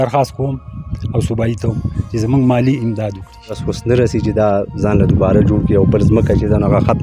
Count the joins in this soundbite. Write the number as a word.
one